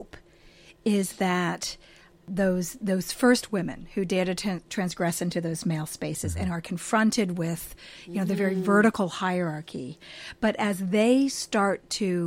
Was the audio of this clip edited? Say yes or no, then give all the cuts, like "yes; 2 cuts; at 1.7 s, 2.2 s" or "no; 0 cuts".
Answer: yes; 1 cut; at 2.2 s